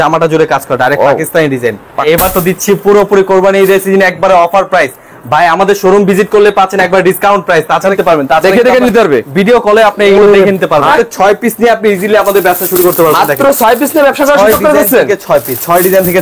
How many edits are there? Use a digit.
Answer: 3